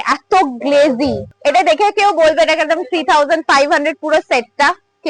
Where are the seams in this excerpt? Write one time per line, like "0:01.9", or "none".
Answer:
0:01.3